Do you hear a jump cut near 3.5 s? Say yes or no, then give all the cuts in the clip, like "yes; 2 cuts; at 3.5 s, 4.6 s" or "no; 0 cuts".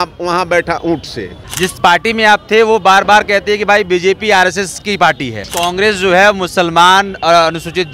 no; 2 cuts; at 1.4 s, 5.4 s